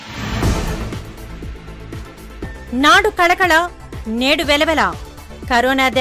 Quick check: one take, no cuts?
no; 1 cut; at 1.1 s

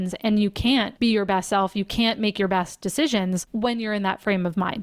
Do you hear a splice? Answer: yes; 2 cuts; at 0.9 s, 3.5 s

